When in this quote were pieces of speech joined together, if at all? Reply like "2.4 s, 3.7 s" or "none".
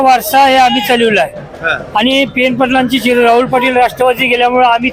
none